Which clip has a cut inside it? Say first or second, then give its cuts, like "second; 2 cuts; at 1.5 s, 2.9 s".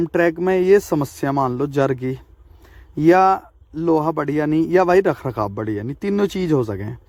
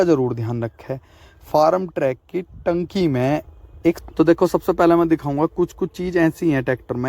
second; 1 cut; at 4.0 s